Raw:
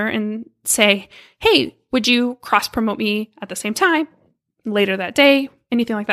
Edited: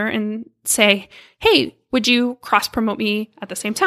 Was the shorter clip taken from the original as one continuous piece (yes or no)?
yes